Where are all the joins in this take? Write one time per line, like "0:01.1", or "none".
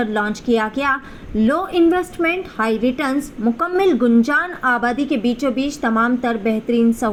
none

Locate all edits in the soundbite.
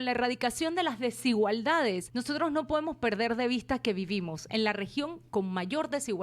0:02.1

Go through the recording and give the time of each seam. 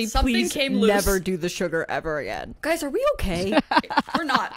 0:02.4

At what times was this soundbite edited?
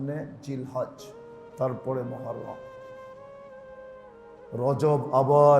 0:02.6
0:04.5

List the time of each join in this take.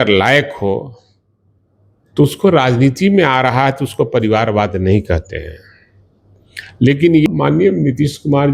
0:07.3

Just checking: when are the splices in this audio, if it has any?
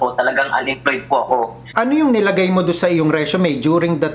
0:01.6

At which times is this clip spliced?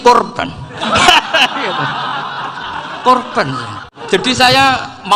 none

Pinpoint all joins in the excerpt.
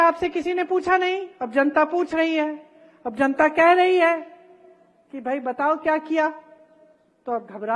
none

